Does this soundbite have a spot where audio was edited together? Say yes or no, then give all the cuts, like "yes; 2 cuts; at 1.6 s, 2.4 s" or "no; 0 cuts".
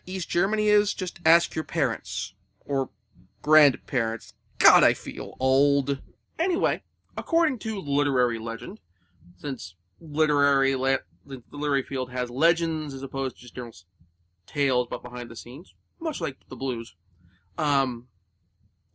yes; 1 cut; at 17.1 s